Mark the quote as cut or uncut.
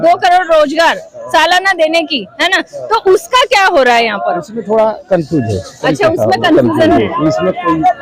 uncut